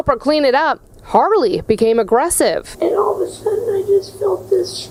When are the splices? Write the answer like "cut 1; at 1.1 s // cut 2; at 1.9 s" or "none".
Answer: none

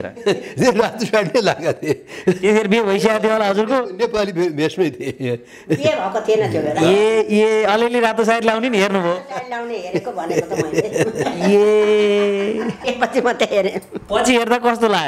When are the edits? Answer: cut 1; at 12.8 s

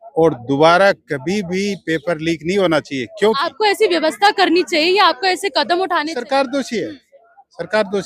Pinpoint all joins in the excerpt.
cut 1; at 3.5 s // cut 2; at 6.1 s

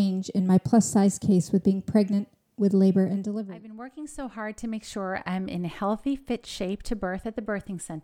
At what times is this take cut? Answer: cut 1; at 3.3 s

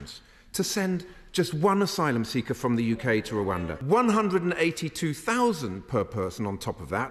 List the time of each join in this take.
cut 1; at 3.7 s

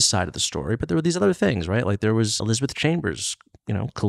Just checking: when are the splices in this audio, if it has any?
cut 1; at 2.4 s

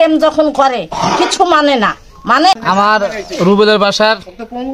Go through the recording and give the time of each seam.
cut 1; at 2.6 s

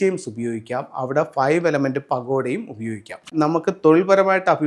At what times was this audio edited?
cut 1; at 3.3 s

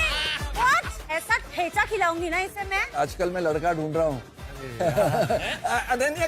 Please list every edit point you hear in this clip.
cut 1; at 2.8 s

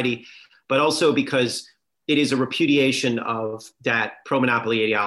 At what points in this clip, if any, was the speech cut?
none

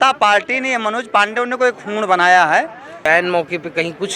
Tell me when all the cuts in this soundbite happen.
cut 1; at 3.0 s

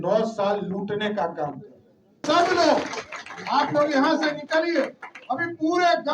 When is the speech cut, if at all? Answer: none

